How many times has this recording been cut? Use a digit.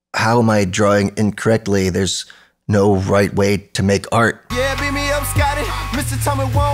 1